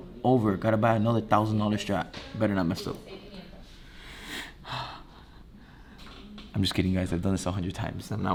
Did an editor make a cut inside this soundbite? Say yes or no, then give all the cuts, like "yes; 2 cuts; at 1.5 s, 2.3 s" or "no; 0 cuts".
no; 0 cuts